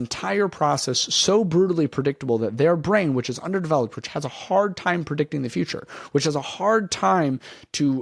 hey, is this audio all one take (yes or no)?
yes